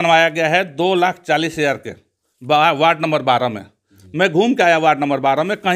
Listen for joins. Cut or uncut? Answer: uncut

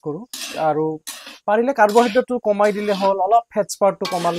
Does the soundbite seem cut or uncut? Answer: uncut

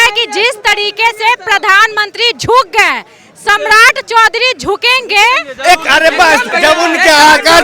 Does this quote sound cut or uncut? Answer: cut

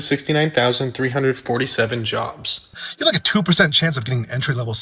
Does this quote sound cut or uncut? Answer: cut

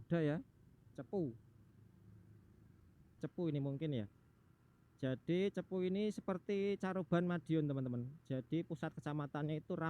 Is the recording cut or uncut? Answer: cut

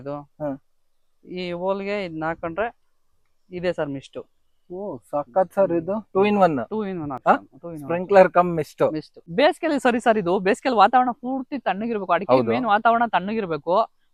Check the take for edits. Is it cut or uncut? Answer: uncut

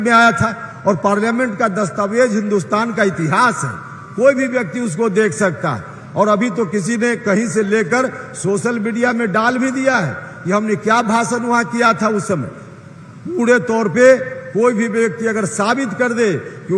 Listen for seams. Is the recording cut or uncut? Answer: uncut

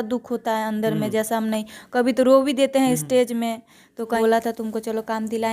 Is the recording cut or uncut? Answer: cut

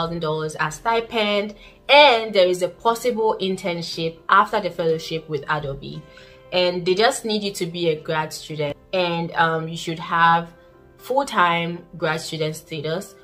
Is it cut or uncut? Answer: uncut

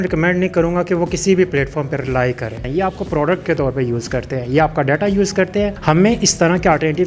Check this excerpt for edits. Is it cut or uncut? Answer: cut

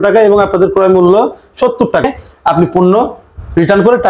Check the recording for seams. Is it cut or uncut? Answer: cut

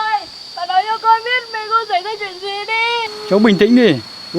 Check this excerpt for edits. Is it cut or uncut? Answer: cut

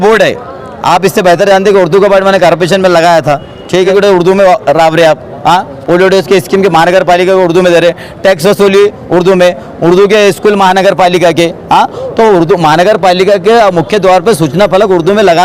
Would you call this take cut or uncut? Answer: cut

